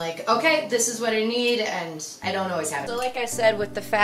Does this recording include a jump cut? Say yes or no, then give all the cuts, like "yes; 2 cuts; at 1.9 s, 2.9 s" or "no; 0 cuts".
yes; 1 cut; at 2.8 s